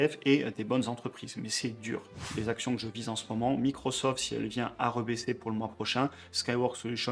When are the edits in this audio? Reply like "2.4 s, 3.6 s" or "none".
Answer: 2.2 s